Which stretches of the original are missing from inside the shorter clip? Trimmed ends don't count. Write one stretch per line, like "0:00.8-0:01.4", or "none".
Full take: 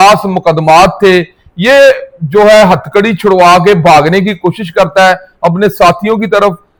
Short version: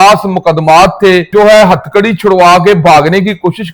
0:01.3-0:02.3